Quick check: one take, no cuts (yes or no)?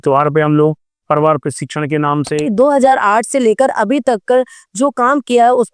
no